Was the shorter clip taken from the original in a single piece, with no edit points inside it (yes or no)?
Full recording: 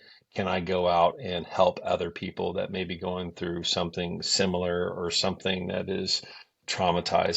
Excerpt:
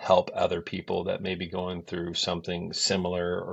yes